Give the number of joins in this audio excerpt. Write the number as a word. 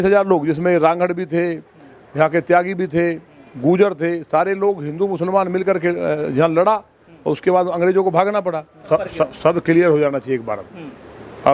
one